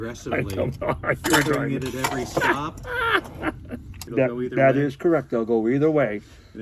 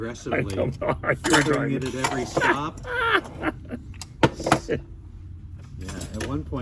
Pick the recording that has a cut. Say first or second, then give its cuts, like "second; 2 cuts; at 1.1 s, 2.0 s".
first; 1 cut; at 4.0 s